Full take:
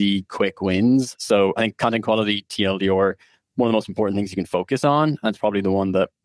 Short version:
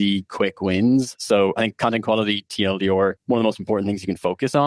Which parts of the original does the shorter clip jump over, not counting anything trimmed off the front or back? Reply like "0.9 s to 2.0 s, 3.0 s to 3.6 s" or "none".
3.2 s to 3.5 s